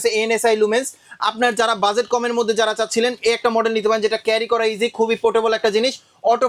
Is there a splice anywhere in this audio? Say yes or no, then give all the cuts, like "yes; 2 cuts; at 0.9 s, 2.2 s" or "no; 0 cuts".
no; 0 cuts